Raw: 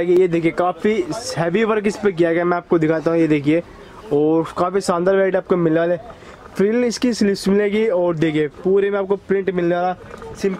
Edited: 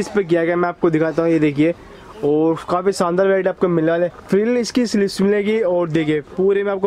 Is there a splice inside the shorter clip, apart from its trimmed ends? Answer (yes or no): yes